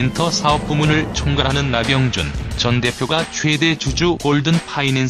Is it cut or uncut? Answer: uncut